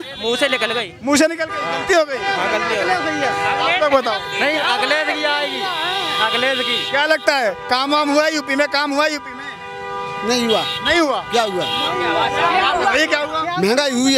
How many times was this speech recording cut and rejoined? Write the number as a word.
zero